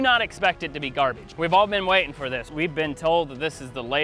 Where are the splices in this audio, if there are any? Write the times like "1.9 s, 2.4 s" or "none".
1.2 s, 2.5 s